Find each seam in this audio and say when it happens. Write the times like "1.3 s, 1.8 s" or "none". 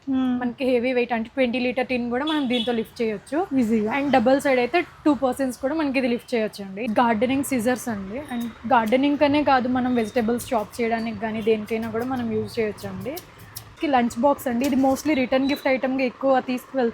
6.7 s, 13.7 s